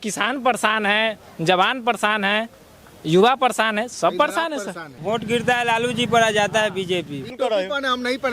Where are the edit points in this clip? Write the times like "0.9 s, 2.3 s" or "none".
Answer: 4.9 s, 7.3 s